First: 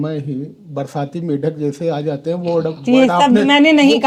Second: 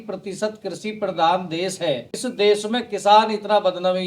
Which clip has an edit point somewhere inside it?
second; 1 cut; at 2.1 s

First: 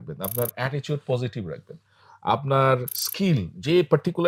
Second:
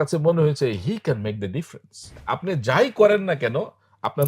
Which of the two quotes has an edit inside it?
second; 1 cut; at 2.2 s

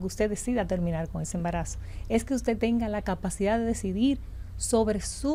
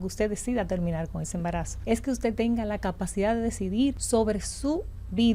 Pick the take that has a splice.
second; 2 cuts; at 1.7 s, 4.0 s

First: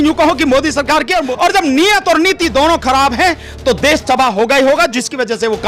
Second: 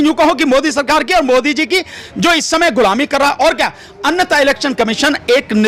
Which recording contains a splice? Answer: first; 1 cut; at 1.3 s

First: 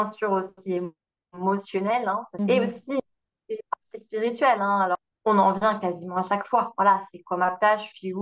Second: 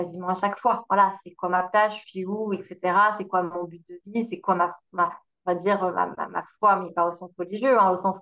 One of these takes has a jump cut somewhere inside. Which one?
first; 2 cuts; at 2.3 s, 4.9 s

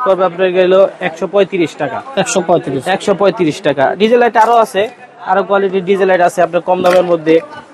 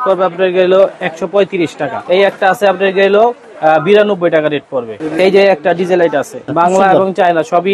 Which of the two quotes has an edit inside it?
second; 3 cuts; at 1.9 s, 4.9 s, 6.4 s

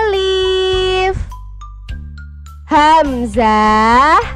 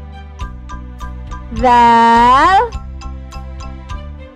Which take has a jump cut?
second; 2 cuts; at 1.2 s, 2.9 s

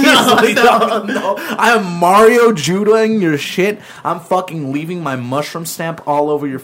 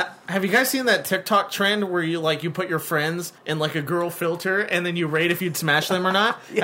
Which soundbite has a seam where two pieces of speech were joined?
second; 1 cut; at 3.3 s

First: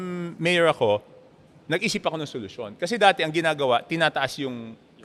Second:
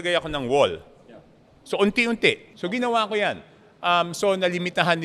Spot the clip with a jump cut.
second; 1 cut; at 2.5 s

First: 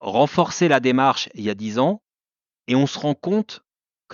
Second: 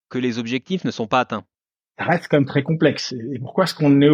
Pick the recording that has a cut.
second; 1 cut; at 1.9 s

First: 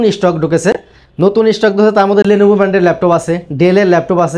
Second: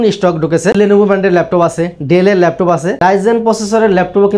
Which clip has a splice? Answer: second; 2 cuts; at 0.8 s, 2.9 s

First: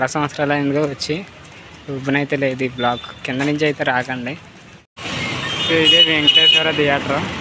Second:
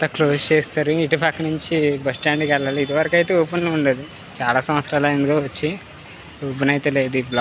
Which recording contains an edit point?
first; 1 cut; at 5.0 s

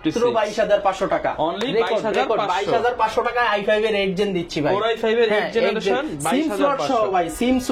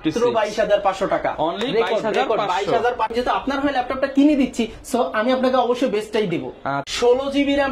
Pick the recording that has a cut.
second; 2 cuts; at 3.1 s, 6.8 s

